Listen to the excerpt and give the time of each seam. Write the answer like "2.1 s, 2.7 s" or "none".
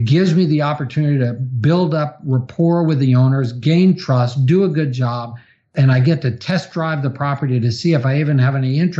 5.7 s